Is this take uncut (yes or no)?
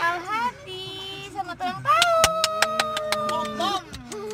yes